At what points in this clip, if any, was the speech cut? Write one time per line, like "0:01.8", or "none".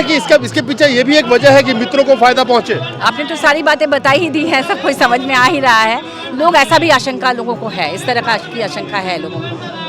none